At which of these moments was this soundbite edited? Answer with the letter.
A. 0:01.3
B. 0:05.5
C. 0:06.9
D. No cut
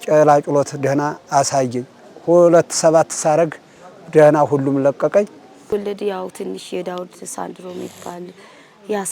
B